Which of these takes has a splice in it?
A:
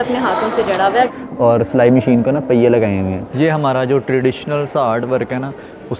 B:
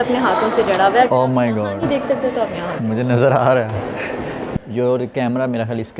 A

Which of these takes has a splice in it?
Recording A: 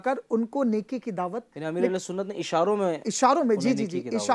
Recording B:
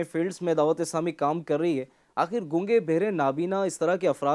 A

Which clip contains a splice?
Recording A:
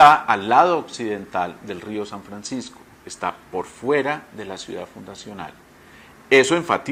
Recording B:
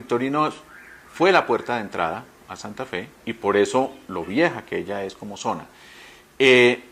B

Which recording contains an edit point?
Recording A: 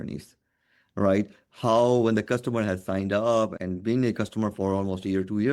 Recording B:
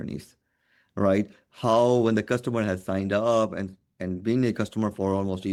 A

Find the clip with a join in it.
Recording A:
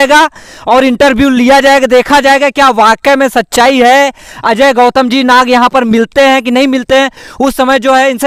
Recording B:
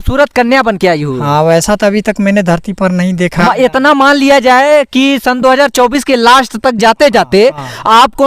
B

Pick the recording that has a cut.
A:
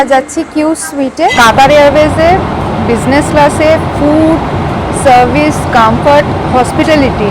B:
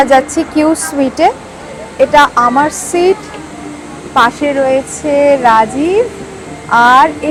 A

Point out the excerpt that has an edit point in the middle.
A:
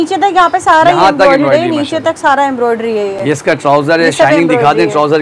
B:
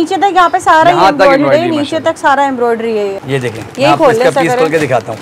B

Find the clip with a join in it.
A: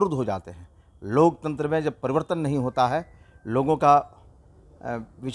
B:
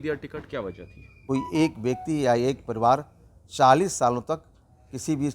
B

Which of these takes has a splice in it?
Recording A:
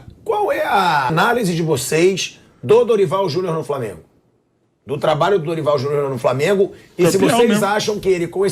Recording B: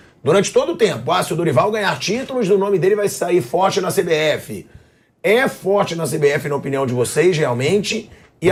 A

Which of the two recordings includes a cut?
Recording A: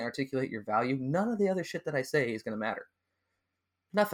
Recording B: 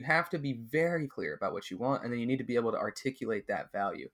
B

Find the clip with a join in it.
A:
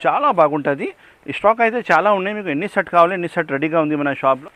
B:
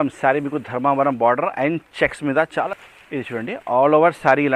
B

